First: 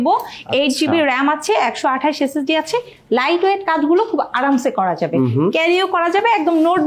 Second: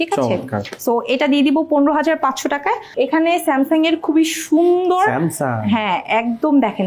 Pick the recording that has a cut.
second; 1 cut; at 2.8 s

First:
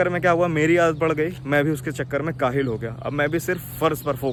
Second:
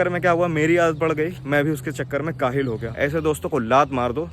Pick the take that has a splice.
second; 1 cut; at 2.9 s

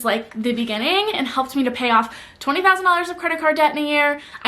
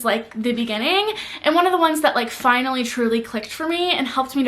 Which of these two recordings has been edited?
first; 1 cut; at 1.2 s

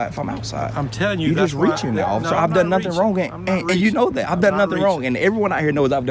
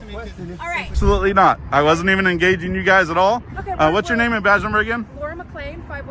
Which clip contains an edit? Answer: second; 1 cut; at 1.0 s

